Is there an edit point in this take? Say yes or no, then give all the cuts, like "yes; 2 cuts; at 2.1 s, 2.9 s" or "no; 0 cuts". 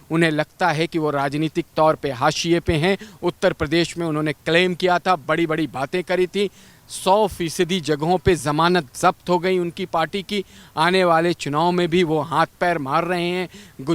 no; 0 cuts